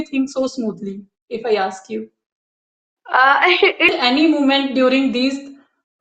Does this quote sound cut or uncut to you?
cut